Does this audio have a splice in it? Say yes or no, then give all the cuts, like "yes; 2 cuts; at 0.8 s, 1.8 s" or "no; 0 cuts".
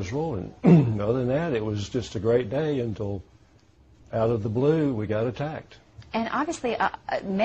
no; 0 cuts